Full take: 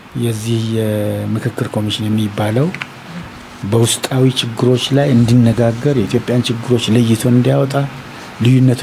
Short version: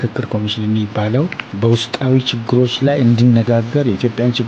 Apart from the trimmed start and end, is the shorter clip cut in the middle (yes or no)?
yes